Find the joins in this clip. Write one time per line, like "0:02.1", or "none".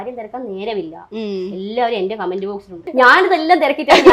0:02.7